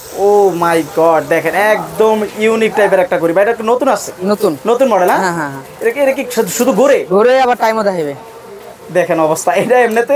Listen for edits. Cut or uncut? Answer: uncut